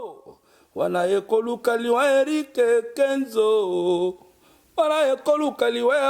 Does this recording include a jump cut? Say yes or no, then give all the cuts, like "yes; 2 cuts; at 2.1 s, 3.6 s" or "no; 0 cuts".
no; 0 cuts